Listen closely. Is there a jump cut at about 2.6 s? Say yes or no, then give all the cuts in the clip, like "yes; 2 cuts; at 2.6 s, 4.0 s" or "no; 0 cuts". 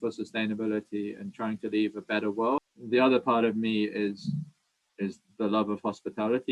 yes; 1 cut; at 2.6 s